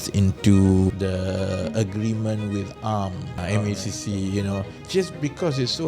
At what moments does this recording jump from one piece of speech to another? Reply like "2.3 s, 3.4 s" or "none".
1.0 s, 3.4 s, 4.8 s